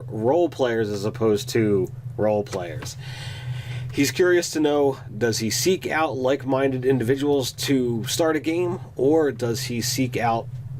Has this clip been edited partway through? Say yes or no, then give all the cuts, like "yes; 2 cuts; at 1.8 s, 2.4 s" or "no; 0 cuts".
yes; 1 cut; at 2.9 s